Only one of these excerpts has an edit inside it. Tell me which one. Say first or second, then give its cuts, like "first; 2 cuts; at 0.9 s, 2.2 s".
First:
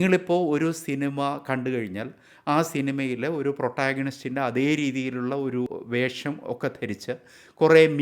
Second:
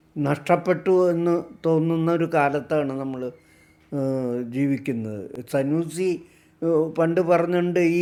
first; 1 cut; at 5.7 s